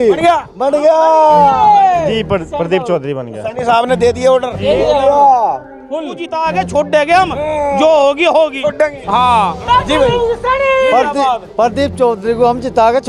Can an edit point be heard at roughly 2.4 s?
no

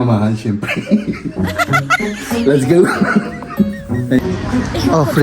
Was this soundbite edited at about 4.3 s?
yes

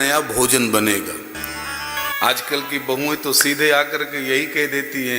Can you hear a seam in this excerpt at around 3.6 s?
no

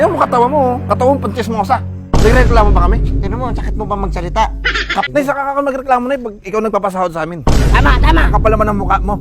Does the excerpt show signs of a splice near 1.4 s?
no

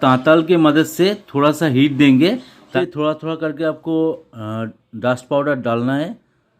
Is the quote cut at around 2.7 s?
yes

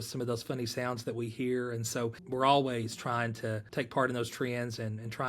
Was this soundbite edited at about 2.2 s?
yes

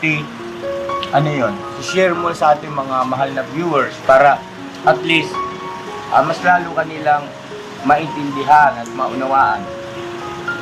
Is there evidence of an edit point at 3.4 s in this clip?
no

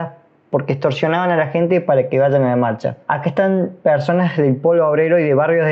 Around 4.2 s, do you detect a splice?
no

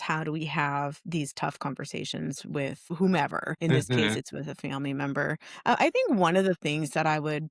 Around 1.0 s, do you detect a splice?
no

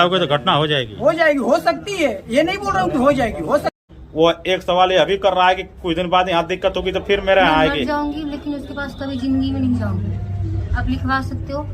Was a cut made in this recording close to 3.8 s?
yes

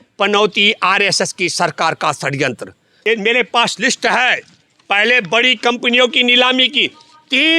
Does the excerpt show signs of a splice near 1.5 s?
no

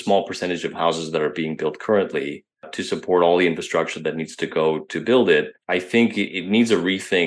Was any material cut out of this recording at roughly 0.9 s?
no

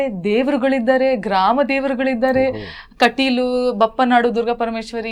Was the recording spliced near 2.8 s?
no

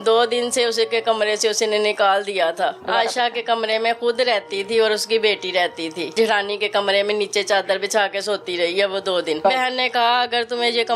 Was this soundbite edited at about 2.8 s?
yes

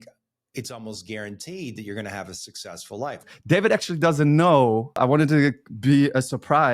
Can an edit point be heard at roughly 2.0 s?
no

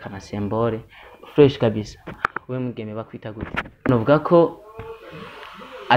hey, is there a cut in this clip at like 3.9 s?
yes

